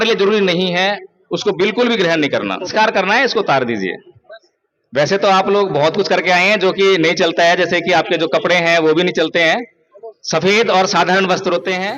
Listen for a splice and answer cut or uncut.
cut